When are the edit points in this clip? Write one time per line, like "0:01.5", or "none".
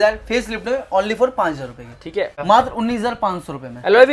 0:02.4

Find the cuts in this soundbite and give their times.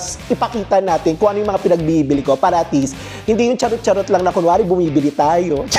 none

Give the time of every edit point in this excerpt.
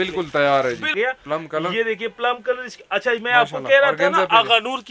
0:00.9

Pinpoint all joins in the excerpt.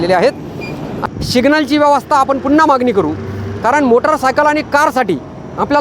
0:00.9

